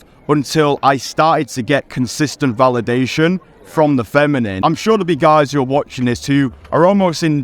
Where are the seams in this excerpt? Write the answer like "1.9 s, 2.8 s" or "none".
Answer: 4.5 s

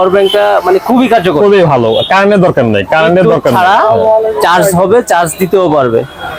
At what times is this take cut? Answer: none

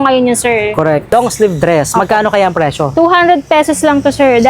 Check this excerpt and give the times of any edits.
1.1 s

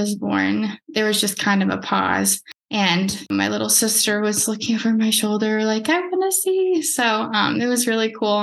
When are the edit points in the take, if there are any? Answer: 3.3 s

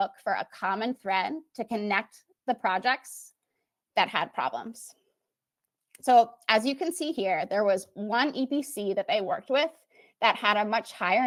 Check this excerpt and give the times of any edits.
none

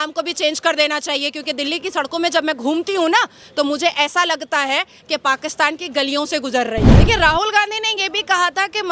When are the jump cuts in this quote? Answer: 6.9 s

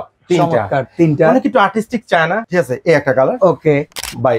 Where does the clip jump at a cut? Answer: 2.4 s

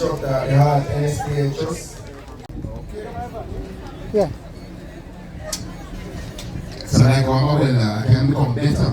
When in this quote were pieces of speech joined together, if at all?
2.5 s

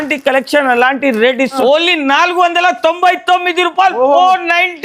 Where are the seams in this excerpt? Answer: 1.6 s

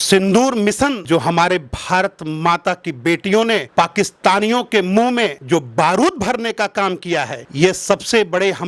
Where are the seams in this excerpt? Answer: 1.0 s

